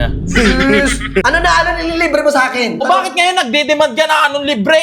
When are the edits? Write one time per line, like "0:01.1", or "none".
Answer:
0:01.2
0:02.8